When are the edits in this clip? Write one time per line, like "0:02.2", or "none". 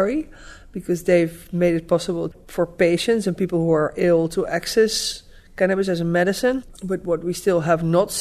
0:02.4
0:06.7